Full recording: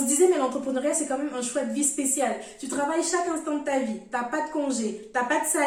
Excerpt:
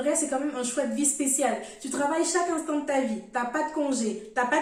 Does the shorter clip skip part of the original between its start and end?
no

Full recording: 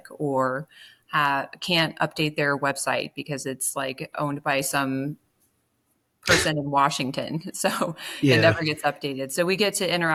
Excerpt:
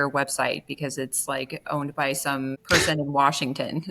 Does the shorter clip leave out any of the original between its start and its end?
yes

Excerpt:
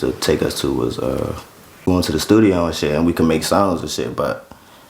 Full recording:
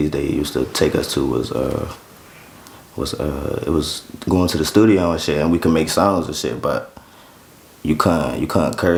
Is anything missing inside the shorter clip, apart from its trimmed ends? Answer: yes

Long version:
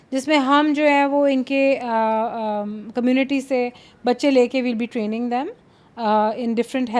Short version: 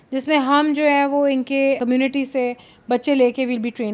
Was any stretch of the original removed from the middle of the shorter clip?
yes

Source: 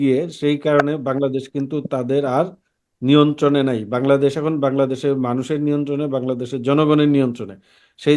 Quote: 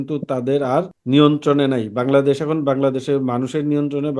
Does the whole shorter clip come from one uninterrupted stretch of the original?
no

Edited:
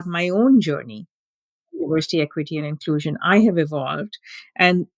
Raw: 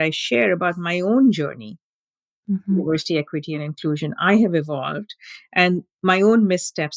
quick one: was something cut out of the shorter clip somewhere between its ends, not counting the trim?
yes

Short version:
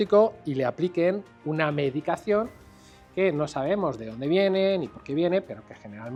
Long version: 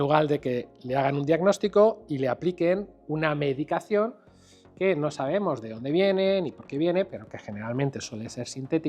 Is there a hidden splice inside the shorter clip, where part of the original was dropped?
no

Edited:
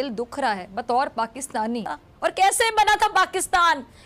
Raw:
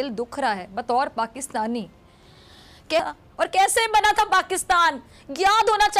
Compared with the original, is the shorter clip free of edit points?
no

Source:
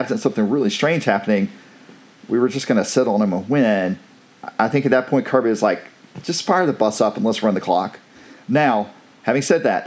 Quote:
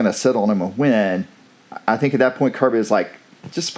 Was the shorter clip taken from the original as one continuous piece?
yes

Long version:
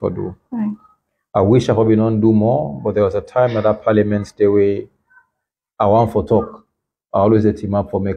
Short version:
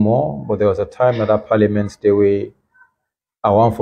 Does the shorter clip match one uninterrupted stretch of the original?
yes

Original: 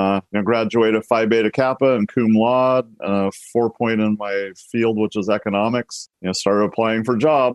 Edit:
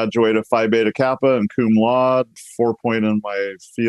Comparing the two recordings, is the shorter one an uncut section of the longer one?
no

